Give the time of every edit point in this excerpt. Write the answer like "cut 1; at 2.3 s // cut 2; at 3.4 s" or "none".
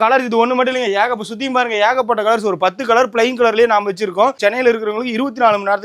cut 1; at 4.4 s